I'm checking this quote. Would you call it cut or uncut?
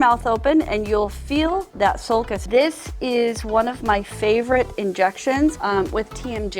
cut